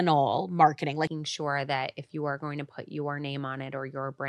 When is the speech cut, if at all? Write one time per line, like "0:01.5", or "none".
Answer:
0:01.1

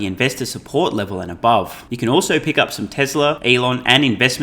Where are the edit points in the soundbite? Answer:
0:01.8
0:03.4

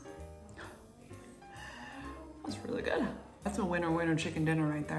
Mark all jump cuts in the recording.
0:03.5

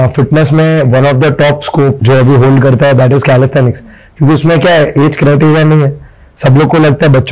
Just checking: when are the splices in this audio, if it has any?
0:02.0

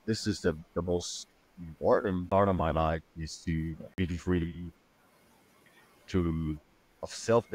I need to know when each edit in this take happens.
0:02.2
0:03.8

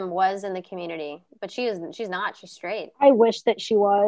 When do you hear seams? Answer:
none

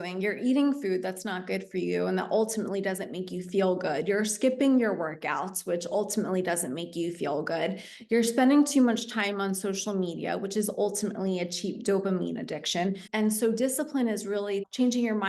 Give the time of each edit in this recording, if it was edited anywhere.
0:13.0

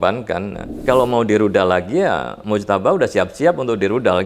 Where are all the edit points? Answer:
0:00.9
0:02.3

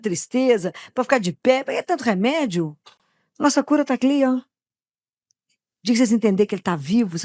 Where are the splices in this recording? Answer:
none

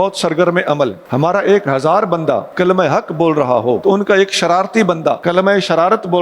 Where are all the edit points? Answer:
0:01.0
0:02.5
0:03.8
0:05.2

